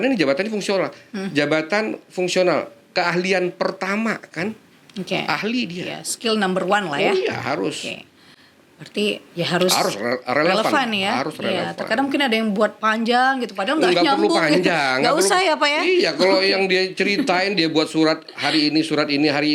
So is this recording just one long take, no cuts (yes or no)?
yes